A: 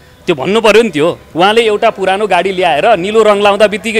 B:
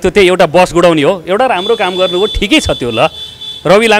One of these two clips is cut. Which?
A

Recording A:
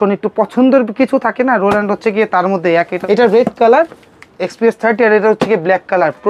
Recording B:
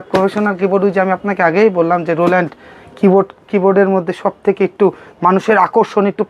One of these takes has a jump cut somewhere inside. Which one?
A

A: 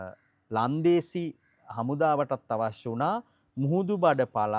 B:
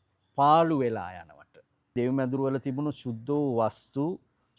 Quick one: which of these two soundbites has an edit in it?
B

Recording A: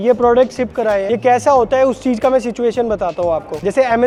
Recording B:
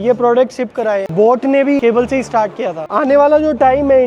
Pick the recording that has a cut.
B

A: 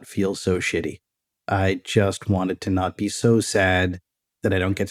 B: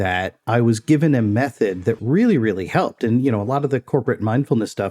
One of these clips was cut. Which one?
B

